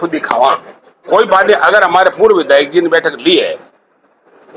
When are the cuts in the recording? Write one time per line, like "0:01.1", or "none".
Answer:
0:01.0